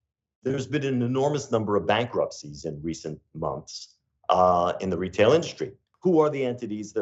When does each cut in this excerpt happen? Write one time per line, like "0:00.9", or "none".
0:05.8